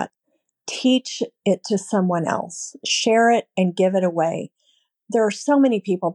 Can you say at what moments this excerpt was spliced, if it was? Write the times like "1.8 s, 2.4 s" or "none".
none